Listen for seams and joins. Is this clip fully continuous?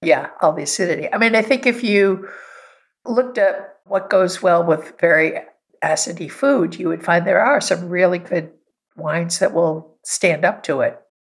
yes; 0 cuts

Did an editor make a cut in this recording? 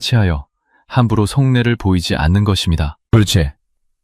yes; 1 cut; at 3.0 s

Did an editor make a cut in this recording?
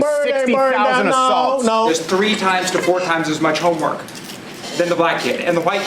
yes; 1 cut; at 1.6 s

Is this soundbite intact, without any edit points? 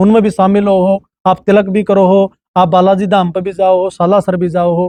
yes; 0 cuts

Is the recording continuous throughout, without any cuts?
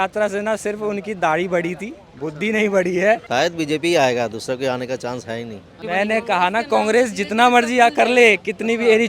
no; 2 cuts; at 3.2 s, 5.8 s

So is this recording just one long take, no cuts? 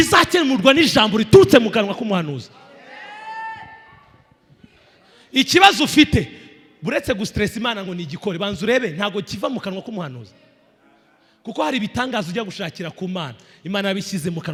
yes; 0 cuts

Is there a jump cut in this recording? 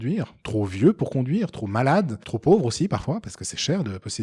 yes; 1 cut; at 2.2 s

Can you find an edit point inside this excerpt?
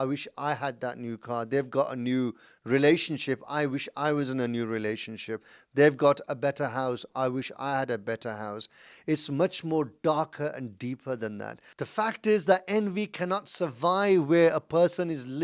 yes; 1 cut; at 11.6 s

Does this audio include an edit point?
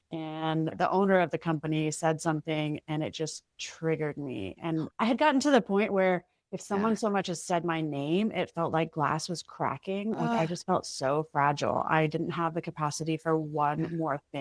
no; 0 cuts

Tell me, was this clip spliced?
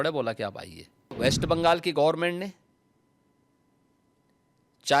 yes; 1 cut; at 1.2 s

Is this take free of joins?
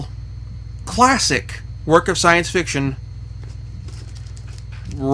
yes; 0 cuts

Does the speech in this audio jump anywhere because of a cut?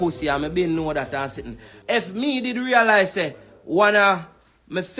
yes; 1 cut; at 1.7 s

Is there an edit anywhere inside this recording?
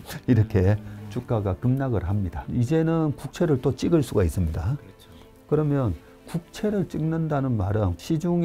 yes; 1 cut; at 2.3 s

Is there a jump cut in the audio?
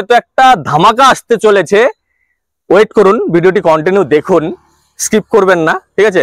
no; 0 cuts

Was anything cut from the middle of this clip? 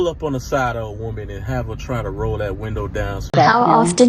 yes; 1 cut; at 3.2 s

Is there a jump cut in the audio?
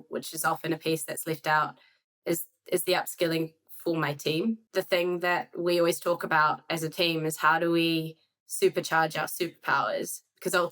yes; 1 cut; at 4.6 s

